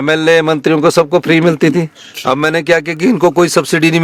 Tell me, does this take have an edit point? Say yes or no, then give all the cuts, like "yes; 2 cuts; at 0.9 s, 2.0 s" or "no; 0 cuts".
no; 0 cuts